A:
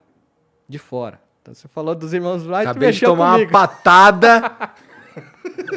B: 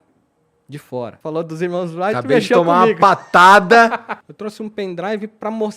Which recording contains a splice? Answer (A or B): B